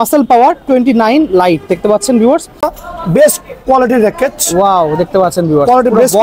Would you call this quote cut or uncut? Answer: cut